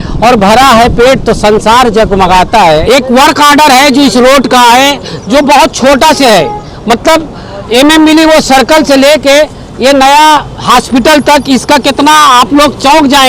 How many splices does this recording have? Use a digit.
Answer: 1